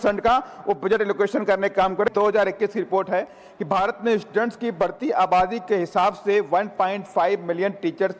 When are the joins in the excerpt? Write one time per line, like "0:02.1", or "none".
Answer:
0:02.1

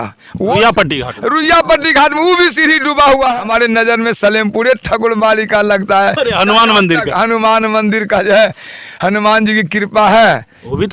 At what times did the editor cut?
0:03.4

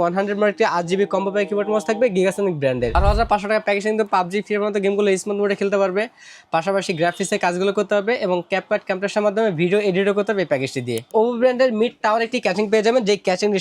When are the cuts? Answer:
0:03.0
0:11.1

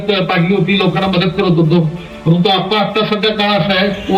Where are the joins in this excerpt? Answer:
none

